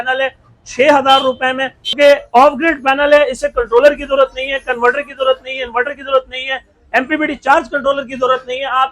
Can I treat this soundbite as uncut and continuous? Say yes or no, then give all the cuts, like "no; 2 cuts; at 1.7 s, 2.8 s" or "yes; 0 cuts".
no; 1 cut; at 1.9 s